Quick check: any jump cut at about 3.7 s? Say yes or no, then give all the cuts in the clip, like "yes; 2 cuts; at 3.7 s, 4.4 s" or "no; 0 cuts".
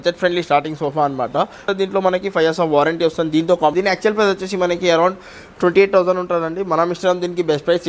yes; 2 cuts; at 1.7 s, 3.7 s